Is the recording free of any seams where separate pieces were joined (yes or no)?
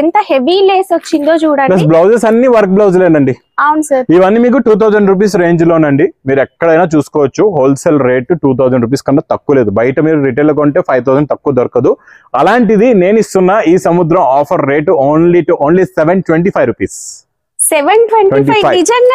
yes